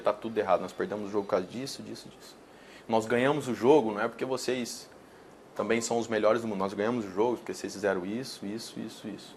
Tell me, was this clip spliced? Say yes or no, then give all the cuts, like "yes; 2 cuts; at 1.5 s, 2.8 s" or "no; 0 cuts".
no; 0 cuts